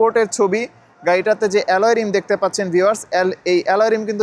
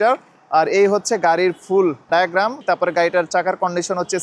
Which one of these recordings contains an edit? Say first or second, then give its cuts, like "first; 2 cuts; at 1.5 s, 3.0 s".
second; 1 cut; at 2.6 s